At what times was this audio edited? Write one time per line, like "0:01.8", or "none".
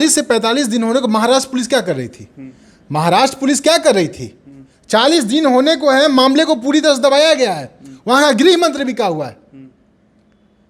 none

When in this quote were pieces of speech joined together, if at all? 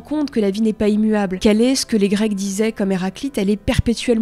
0:01.3

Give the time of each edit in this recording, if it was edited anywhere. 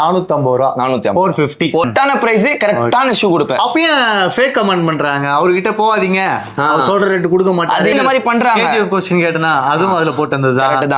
0:01.8
0:07.9

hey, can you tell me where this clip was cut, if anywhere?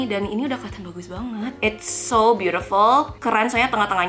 0:01.5

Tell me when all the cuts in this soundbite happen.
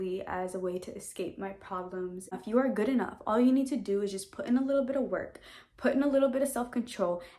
0:02.4

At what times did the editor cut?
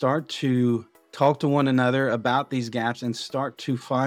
0:01.0

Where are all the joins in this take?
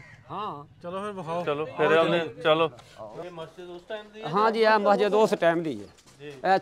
0:03.1

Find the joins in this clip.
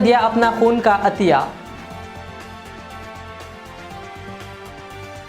0:01.6
0:04.3

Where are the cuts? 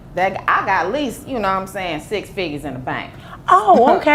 none

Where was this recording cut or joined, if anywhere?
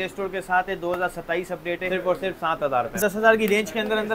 0:01.8
0:03.0

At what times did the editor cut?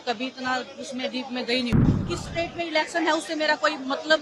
0:01.8

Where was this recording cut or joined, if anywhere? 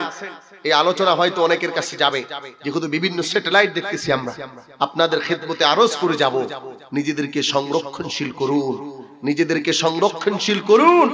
none

